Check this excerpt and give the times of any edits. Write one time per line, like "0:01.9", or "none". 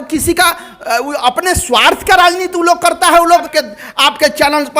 0:03.5

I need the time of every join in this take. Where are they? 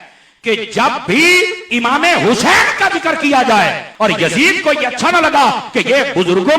0:03.8

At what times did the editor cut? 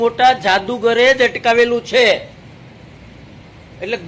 none

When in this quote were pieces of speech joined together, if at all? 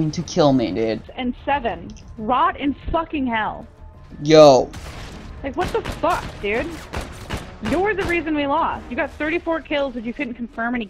0:01.0

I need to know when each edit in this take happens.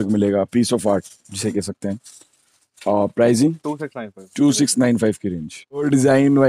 none

